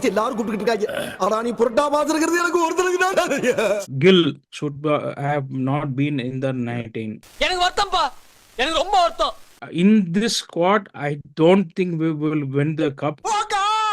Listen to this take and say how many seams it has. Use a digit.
3